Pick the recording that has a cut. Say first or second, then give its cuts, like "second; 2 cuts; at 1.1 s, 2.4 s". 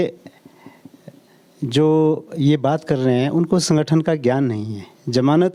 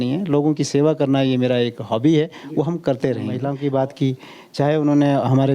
second; 1 cut; at 3.4 s